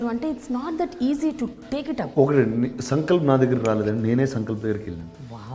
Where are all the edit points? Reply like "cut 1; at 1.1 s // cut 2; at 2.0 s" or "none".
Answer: none